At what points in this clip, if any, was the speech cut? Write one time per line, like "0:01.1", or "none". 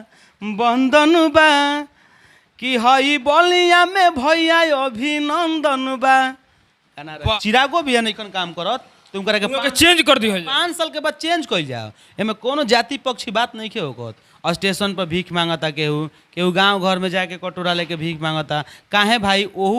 0:07.3
0:14.2